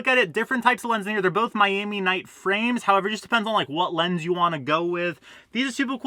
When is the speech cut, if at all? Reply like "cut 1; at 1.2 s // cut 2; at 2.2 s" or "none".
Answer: none